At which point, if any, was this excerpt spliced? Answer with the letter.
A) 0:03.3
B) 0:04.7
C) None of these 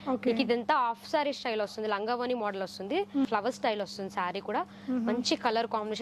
A